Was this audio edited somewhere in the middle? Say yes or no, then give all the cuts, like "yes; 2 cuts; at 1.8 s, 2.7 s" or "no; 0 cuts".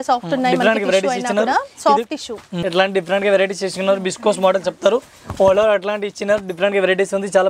yes; 1 cut; at 2.6 s